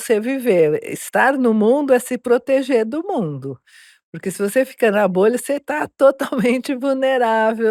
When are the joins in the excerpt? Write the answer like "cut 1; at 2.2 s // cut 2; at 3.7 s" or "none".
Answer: none